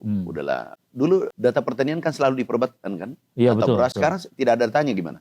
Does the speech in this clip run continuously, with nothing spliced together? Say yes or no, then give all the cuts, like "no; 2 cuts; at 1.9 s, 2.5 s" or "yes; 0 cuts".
no; 2 cuts; at 1.3 s, 3.9 s